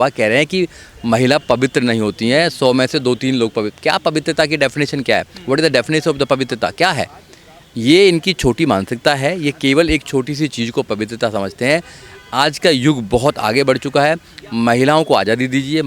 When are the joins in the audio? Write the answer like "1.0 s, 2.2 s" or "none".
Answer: none